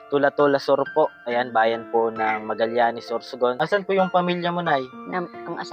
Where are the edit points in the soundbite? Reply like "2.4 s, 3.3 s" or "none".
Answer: 3.6 s